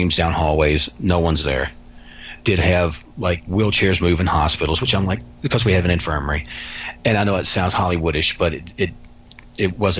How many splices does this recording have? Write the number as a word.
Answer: zero